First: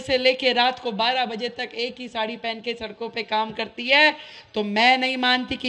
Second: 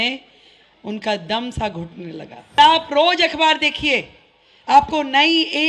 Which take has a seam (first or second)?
second